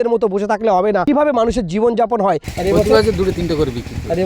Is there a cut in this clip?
yes; 2 cuts; at 1.0 s, 2.5 s

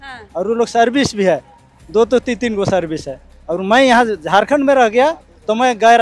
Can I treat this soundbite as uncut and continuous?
yes; 0 cuts

